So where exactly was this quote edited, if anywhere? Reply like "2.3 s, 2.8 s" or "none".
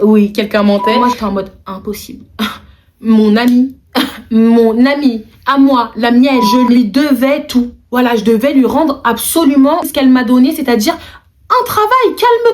1.0 s, 6.5 s, 9.9 s